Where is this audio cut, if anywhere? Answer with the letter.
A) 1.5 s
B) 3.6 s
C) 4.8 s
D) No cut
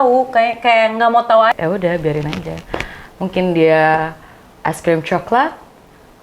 A